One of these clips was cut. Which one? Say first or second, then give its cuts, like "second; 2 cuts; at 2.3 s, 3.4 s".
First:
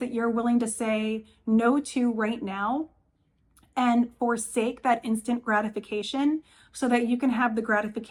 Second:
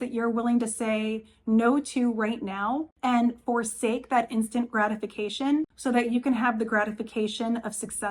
second; 2 cuts; at 2.9 s, 5.7 s